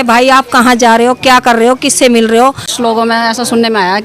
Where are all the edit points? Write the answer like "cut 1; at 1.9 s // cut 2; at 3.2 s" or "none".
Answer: cut 1; at 2.7 s